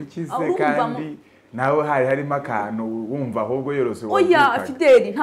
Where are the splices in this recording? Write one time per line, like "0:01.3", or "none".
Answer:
none